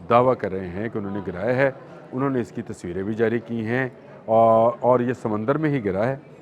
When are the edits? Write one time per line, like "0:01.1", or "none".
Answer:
none